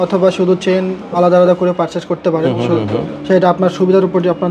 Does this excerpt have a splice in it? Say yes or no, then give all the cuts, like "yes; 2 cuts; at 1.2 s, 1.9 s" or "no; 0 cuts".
no; 0 cuts